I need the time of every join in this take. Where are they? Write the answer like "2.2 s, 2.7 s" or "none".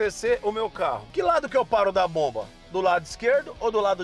1.0 s